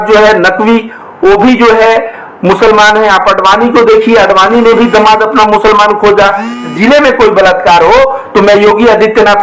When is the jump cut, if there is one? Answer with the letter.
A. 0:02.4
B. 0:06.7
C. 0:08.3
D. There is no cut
B